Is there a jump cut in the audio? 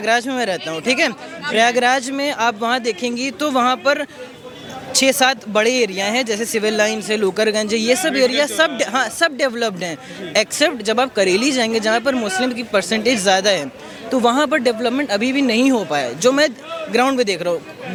no; 0 cuts

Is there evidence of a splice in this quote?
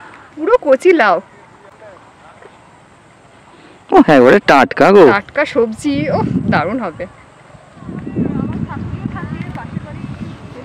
no; 0 cuts

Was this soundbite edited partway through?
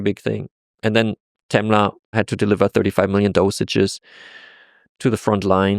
yes; 2 cuts; at 2.1 s, 4.9 s

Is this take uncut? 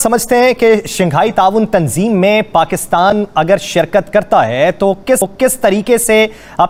yes; 0 cuts

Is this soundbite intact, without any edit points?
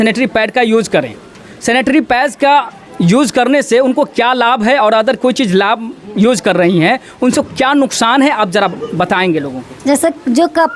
yes; 0 cuts

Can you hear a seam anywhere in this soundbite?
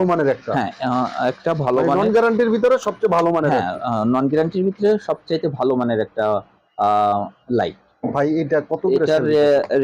no; 0 cuts

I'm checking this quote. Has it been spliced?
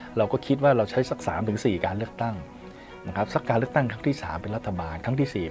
no; 0 cuts

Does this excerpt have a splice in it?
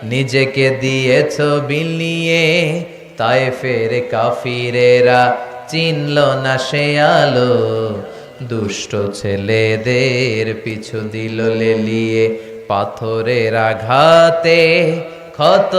no; 0 cuts

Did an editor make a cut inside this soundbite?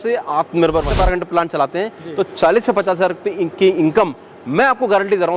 yes; 1 cut; at 0.9 s

